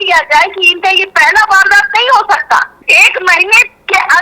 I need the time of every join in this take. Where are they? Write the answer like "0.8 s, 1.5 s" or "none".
2.8 s